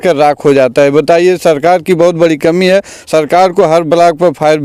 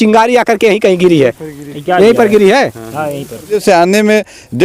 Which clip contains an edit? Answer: second; 1 cut; at 3.6 s

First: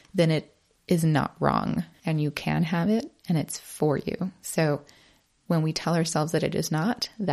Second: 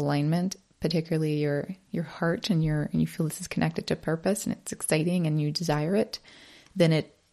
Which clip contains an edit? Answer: first; 1 cut; at 1.9 s

